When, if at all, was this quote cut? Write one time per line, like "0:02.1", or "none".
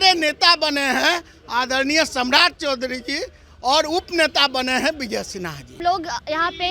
0:05.8